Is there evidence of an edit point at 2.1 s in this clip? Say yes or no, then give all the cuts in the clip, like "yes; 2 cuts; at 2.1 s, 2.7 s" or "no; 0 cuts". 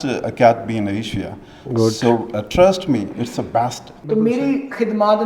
no; 1 cut; at 3.9 s